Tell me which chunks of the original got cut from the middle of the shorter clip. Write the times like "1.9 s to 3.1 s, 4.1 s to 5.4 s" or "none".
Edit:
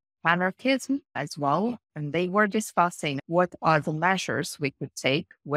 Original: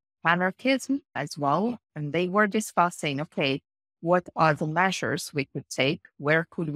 3.1 s to 3.9 s

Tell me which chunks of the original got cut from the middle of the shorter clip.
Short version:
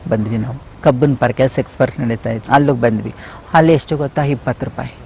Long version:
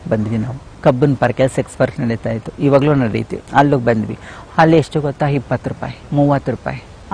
2.4 s to 3.4 s

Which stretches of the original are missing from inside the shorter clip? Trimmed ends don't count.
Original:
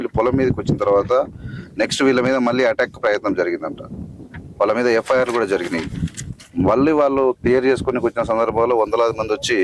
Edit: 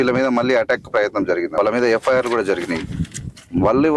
3.6 s to 4.5 s

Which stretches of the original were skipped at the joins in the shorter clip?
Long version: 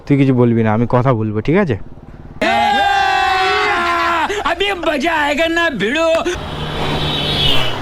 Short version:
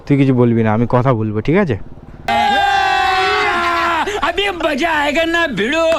2.3 s to 2.5 s

